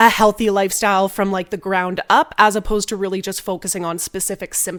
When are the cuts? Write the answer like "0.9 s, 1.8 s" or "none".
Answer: none